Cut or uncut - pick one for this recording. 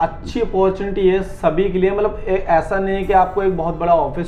uncut